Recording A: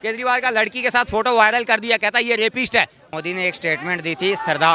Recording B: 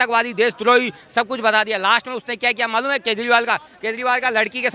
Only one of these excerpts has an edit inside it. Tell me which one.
A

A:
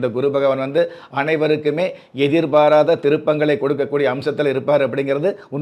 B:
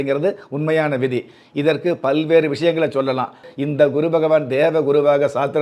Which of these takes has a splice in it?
B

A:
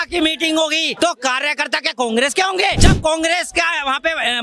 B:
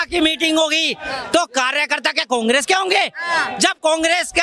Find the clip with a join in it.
A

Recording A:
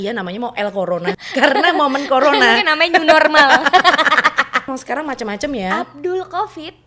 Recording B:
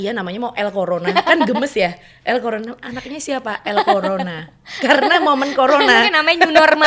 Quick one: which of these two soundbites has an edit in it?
A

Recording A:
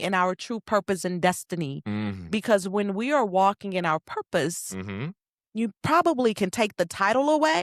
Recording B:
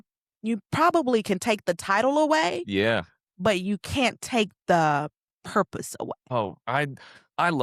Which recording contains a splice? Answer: B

